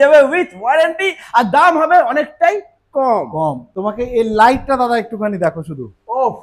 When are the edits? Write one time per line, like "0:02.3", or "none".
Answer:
0:03.7